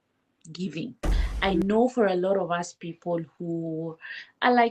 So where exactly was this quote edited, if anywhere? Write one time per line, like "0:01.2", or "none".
0:01.2